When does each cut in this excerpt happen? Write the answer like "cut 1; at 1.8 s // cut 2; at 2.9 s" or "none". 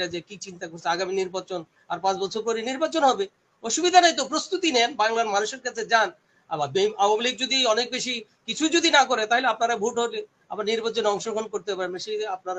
none